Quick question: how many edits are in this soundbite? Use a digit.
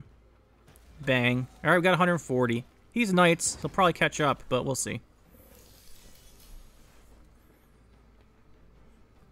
0